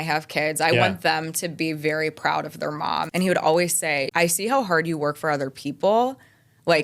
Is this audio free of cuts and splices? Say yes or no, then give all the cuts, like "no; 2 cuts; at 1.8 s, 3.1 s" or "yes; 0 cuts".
no; 2 cuts; at 3.1 s, 4.1 s